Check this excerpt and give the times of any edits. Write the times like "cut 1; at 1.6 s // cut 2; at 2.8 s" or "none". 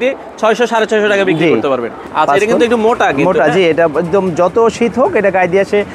cut 1; at 2.0 s